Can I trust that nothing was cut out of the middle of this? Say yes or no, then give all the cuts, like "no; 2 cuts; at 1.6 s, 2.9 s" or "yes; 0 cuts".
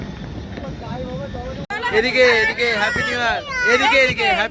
no; 1 cut; at 1.7 s